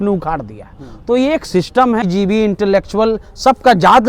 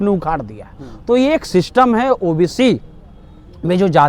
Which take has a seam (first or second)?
first